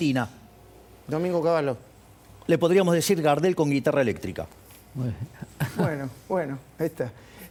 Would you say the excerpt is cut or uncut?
uncut